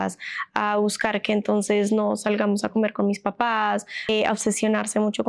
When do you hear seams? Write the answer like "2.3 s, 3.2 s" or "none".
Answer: 3.9 s

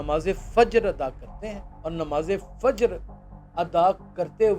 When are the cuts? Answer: 1.7 s

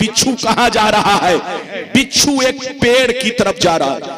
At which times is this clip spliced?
1.6 s

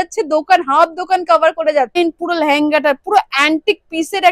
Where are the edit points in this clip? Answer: 1.9 s

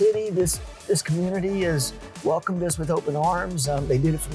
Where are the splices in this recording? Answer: none

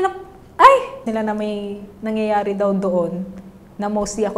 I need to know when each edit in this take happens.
1.0 s

